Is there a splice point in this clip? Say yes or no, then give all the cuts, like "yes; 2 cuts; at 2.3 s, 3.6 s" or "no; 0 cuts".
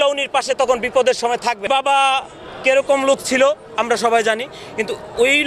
yes; 1 cut; at 1.6 s